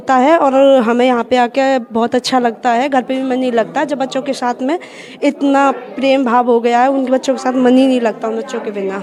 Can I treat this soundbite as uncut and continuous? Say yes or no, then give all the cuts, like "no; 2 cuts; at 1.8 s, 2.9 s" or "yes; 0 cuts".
yes; 0 cuts